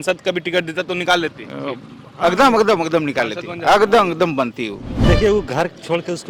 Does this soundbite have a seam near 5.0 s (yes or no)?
yes